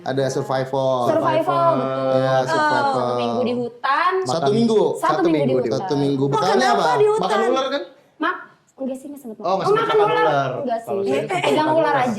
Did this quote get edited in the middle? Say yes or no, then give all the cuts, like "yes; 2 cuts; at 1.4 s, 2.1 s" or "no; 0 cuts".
no; 0 cuts